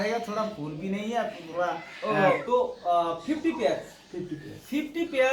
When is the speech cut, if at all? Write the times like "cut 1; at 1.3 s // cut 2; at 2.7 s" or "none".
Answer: cut 1; at 2.4 s